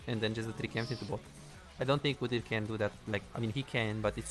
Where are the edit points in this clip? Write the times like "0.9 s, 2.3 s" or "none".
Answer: none